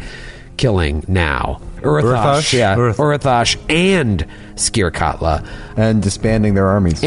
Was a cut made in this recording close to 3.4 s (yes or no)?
no